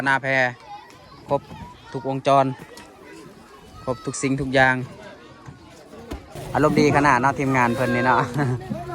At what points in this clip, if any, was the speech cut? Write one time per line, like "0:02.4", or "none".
0:06.3